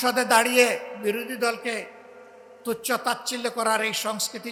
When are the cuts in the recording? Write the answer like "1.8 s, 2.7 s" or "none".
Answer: none